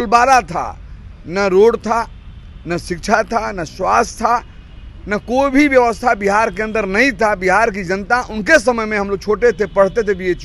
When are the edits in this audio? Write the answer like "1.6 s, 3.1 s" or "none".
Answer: none